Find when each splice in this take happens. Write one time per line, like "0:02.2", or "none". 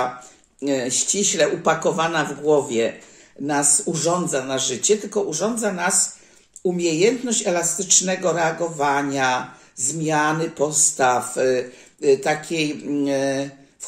none